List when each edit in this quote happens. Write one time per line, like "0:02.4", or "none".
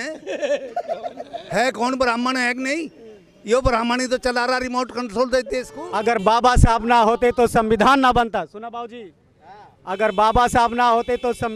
0:05.8